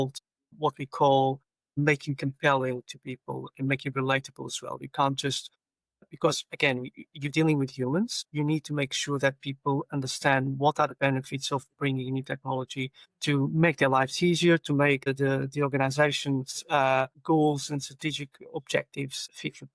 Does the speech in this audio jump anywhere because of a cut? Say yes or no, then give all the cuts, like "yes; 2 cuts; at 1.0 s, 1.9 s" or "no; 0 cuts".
no; 0 cuts